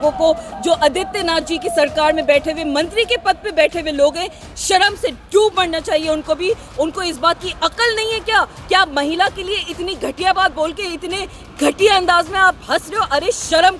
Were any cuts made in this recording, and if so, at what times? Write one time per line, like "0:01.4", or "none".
none